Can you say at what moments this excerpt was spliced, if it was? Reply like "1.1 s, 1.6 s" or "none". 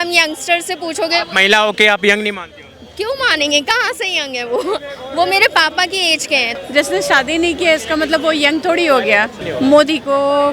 6.5 s, 9.4 s

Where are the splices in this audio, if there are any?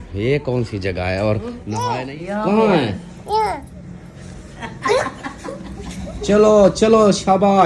1.7 s

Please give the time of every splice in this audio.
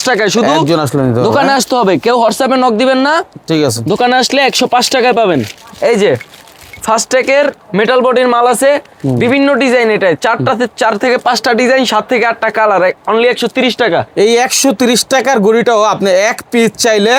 none

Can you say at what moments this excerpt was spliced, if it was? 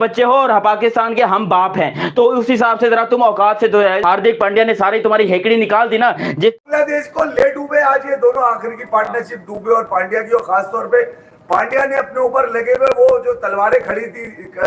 6.6 s

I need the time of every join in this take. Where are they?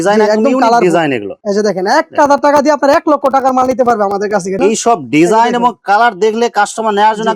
1.4 s, 4.6 s

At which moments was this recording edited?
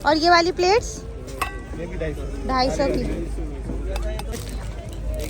4.3 s

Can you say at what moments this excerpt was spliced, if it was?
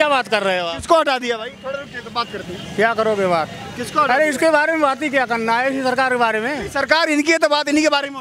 none

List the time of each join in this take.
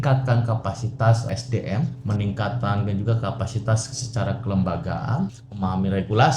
1.4 s, 5.4 s

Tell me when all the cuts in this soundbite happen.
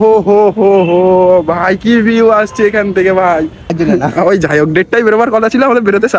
3.7 s

